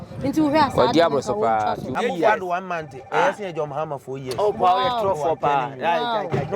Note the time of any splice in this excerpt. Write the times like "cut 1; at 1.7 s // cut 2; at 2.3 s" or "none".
cut 1; at 2.0 s